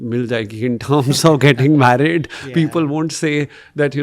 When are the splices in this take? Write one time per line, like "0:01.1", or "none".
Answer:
none